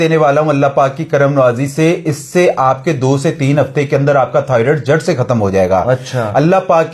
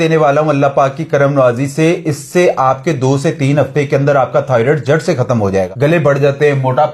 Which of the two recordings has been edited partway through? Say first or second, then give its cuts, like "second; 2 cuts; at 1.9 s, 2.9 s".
second; 1 cut; at 5.7 s